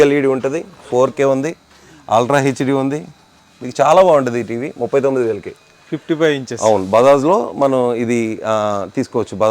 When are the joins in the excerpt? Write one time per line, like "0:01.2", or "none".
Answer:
none